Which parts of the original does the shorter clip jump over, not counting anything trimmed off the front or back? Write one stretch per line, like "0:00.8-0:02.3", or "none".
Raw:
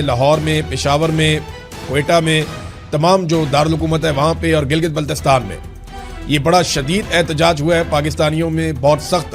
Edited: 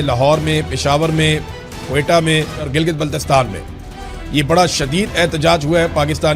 0:02.7-0:04.6